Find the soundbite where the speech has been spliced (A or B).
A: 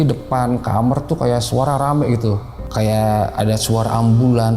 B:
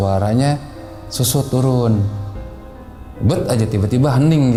A